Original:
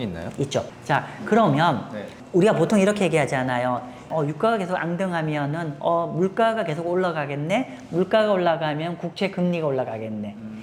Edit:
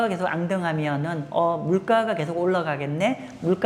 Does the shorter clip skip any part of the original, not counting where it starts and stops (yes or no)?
no